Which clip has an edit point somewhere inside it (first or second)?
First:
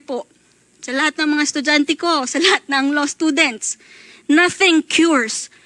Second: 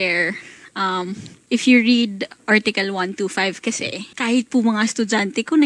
second